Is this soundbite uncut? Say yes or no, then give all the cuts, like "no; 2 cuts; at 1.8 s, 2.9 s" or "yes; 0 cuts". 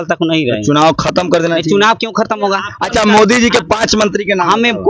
no; 1 cut; at 2.7 s